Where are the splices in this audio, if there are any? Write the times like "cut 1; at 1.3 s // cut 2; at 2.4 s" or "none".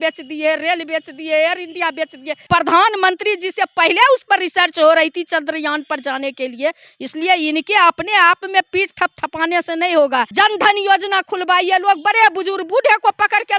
cut 1; at 2.5 s // cut 2; at 10.3 s